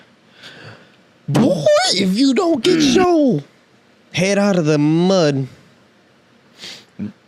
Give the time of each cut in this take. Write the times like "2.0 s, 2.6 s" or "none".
none